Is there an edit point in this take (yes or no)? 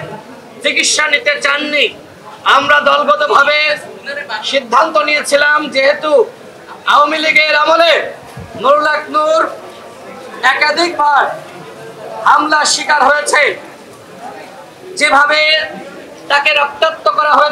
no